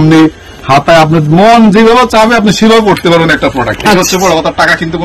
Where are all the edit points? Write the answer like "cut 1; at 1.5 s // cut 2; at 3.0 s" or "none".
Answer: none